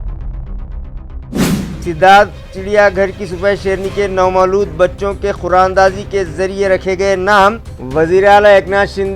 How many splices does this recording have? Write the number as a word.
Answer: one